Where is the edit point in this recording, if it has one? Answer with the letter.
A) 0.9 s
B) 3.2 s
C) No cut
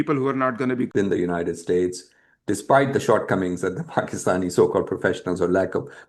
A